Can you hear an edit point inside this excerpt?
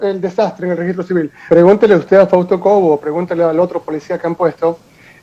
yes; 1 cut; at 1.5 s

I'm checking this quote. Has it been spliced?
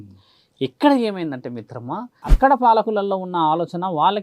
yes; 1 cut; at 2.2 s

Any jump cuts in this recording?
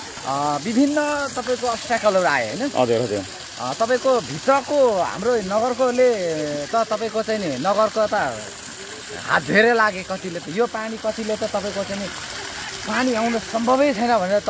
no; 0 cuts

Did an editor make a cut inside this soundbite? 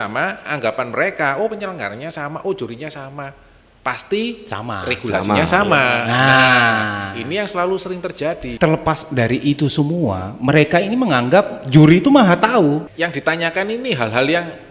yes; 2 cuts; at 8.5 s, 12.9 s

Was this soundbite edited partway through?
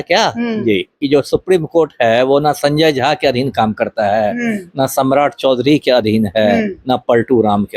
yes; 1 cut; at 1.0 s

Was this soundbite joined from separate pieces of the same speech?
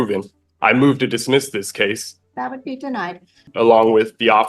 yes; 2 cuts; at 2.1 s, 3.5 s

